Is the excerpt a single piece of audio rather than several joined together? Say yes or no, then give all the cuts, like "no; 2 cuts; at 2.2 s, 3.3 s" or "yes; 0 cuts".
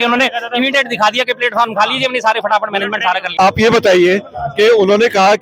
no; 1 cut; at 3.3 s